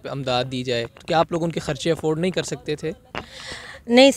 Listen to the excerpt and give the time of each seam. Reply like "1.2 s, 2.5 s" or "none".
none